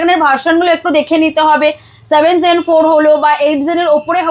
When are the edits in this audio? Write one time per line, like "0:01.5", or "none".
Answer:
none